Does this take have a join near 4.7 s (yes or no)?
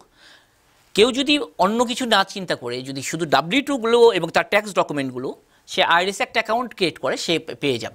no